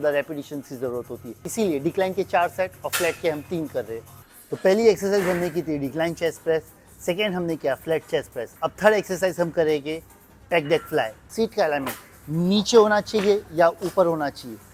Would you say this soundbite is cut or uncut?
uncut